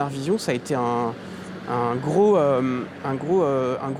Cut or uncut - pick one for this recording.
uncut